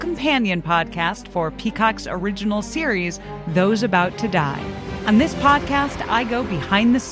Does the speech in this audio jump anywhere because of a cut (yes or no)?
yes